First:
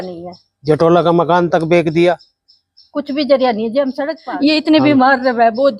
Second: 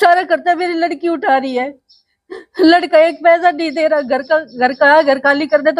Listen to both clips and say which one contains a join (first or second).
first